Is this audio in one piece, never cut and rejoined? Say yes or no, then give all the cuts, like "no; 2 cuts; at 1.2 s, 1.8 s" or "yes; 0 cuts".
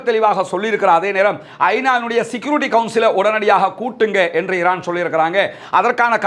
yes; 0 cuts